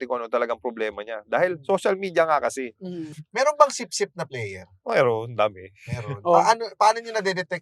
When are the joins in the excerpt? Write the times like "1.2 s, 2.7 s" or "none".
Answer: 3.2 s